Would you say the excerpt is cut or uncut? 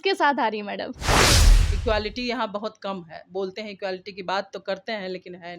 cut